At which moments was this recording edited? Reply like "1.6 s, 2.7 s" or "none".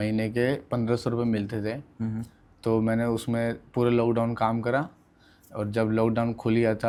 none